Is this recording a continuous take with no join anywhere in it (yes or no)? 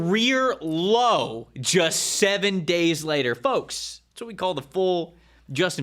yes